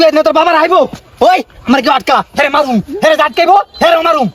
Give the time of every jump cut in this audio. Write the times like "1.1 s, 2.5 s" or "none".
none